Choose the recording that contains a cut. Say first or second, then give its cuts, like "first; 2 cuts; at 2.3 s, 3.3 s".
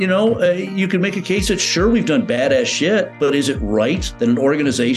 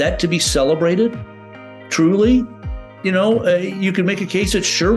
first; 2 cuts; at 3.1 s, 4.1 s